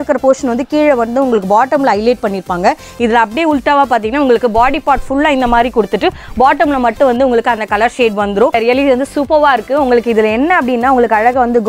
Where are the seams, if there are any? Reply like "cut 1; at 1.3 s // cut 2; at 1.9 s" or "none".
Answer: cut 1; at 8.5 s